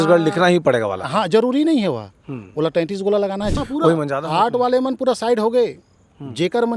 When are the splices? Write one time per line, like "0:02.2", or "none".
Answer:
0:03.5

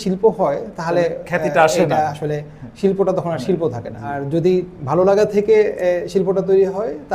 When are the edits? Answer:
0:04.2

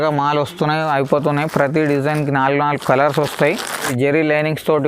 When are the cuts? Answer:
0:03.9

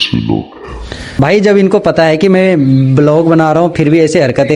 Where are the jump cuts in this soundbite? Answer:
0:01.1

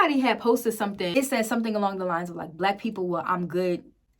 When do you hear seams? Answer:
0:01.1

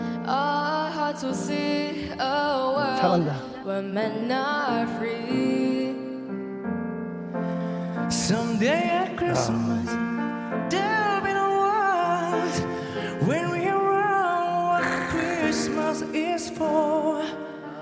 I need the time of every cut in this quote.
none

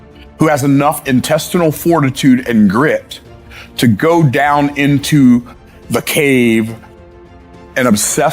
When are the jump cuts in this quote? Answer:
0:05.6
0:07.2

